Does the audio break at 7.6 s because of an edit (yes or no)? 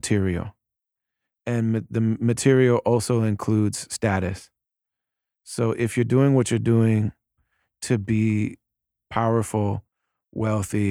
no